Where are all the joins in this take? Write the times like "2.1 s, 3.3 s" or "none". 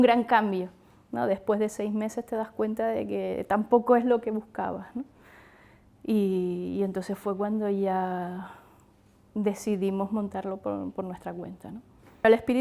7.0 s